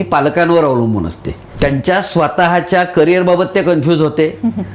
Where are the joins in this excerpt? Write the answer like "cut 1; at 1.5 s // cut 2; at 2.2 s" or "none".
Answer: cut 1; at 1.5 s